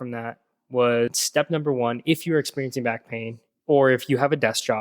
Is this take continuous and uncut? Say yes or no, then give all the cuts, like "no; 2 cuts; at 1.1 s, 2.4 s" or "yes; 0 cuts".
no; 1 cut; at 1.2 s